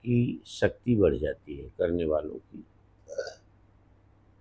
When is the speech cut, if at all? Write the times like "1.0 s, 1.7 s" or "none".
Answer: none